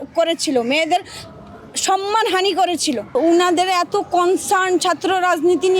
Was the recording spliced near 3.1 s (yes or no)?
yes